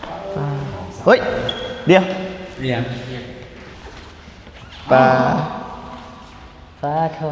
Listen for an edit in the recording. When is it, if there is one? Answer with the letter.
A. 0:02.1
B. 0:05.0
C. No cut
C